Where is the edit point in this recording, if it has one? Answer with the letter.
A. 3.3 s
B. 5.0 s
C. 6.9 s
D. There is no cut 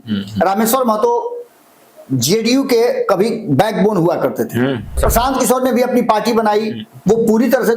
B